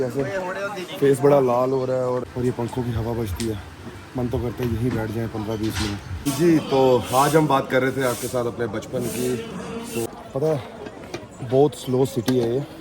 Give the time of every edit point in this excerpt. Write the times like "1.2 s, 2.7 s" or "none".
2.2 s, 6.1 s, 10.1 s